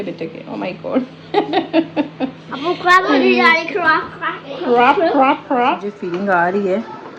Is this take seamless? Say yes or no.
no